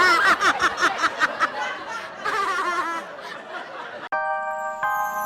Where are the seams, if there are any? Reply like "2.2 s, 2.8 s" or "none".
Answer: 4.1 s

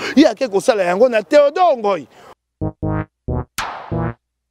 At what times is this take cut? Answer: 2.3 s

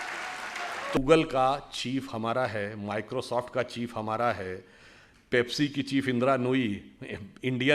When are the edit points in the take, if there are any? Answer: 1.0 s

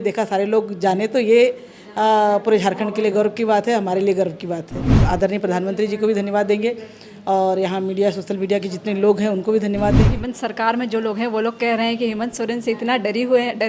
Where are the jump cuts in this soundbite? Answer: 4.9 s, 10.1 s

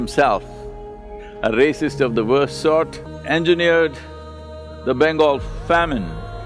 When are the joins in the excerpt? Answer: 3.1 s

